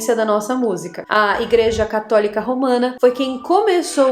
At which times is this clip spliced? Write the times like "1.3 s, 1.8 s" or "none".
0.9 s